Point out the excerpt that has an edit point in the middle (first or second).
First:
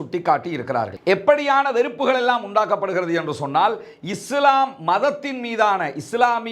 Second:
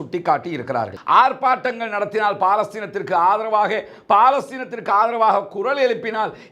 second